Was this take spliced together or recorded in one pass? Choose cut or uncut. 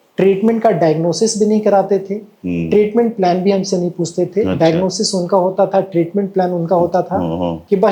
uncut